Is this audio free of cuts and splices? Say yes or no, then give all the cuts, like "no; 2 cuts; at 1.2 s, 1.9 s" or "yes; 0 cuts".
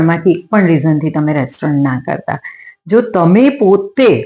yes; 0 cuts